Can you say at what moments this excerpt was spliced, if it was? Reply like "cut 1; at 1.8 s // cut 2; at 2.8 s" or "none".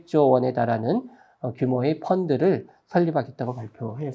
none